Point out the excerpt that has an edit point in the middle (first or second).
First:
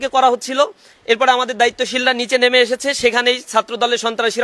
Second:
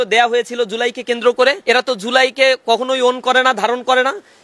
second